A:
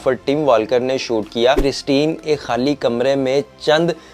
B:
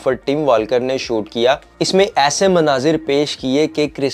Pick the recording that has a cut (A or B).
A